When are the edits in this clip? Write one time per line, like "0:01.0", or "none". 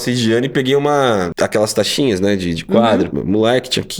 0:01.3
0:03.1